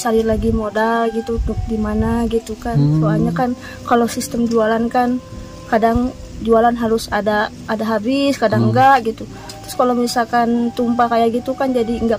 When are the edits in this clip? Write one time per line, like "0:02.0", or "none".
none